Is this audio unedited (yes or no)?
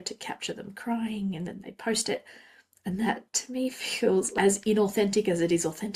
no